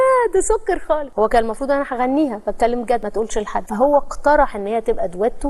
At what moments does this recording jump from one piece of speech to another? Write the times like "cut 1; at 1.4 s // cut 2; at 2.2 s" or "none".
cut 1; at 1.1 s